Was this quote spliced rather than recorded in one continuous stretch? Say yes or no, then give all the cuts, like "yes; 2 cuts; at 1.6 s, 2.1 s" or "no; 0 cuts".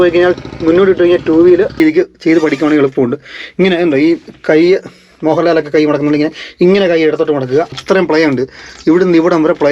yes; 2 cuts; at 1.8 s, 7.8 s